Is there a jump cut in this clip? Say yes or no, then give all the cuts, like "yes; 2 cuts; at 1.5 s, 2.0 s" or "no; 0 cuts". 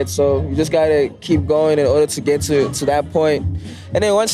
no; 0 cuts